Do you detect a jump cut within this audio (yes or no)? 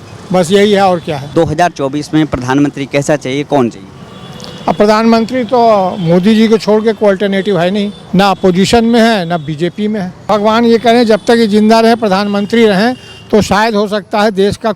yes